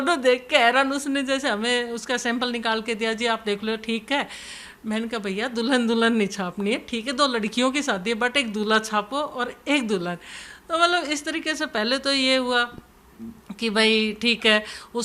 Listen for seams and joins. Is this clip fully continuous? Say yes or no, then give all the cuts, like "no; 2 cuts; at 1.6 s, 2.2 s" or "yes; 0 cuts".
yes; 0 cuts